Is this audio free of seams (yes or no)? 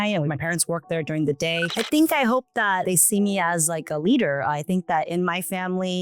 no